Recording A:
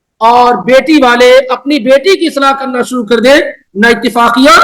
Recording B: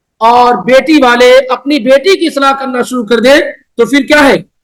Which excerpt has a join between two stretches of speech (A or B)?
A